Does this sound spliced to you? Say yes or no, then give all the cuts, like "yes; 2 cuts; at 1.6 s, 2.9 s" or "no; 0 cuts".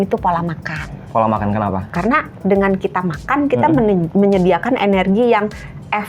yes; 2 cuts; at 1.0 s, 1.9 s